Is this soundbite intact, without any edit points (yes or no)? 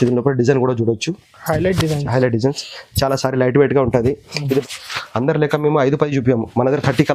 no